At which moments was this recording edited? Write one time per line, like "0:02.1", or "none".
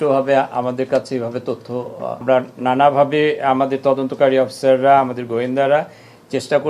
0:02.2